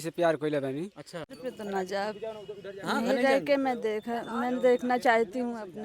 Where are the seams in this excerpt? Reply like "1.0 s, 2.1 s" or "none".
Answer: 1.3 s